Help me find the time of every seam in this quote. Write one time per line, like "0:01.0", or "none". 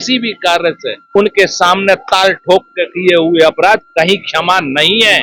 0:01.1